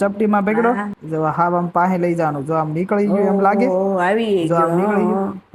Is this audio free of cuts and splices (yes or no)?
no